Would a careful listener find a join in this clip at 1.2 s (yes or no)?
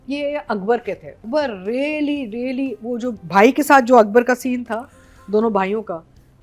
yes